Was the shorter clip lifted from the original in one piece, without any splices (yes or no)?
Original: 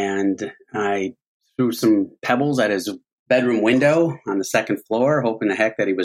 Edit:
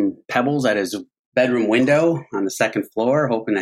yes